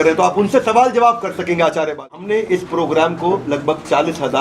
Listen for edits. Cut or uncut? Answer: cut